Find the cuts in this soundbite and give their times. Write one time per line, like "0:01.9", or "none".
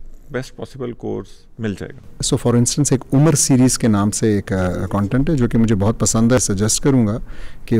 0:02.2
0:06.4